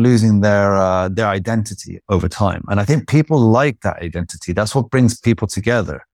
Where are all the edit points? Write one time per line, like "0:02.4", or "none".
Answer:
none